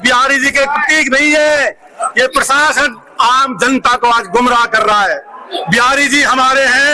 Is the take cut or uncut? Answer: uncut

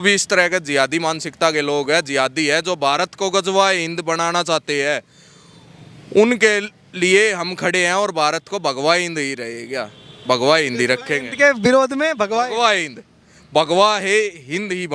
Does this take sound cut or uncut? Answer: uncut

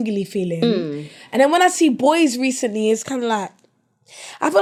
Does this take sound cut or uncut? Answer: uncut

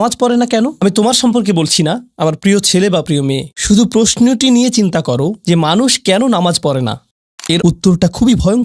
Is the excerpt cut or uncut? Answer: cut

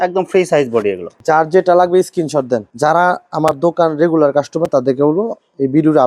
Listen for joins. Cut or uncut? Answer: uncut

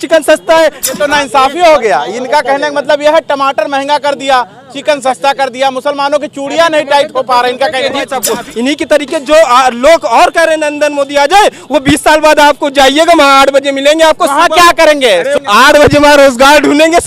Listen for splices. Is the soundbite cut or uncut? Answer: cut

